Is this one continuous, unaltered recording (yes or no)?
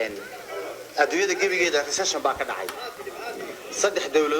yes